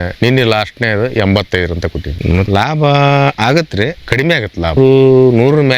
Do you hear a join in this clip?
yes; 3 cuts; at 2.4 s, 3.4 s, 4.8 s

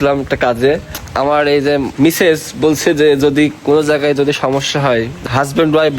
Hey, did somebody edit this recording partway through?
yes; 3 cuts; at 1.0 s, 1.9 s, 5.1 s

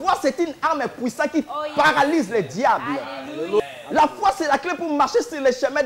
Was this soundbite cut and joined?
yes; 1 cut; at 3.6 s

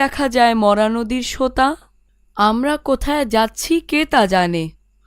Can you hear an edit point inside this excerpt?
yes; 1 cut; at 2.3 s

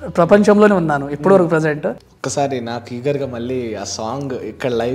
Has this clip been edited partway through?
yes; 1 cut; at 2.0 s

